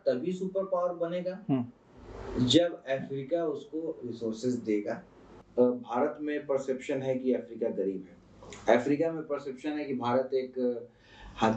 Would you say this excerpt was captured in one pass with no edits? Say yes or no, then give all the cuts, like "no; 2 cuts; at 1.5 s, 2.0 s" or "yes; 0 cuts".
no; 1 cut; at 5.4 s